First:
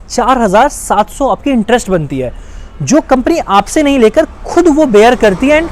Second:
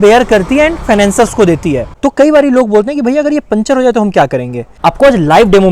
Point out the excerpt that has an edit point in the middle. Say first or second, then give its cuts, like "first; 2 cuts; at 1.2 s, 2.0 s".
second; 2 cuts; at 1.9 s, 4.7 s